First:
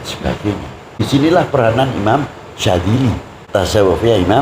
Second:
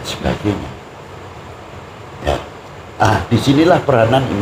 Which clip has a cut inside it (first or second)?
first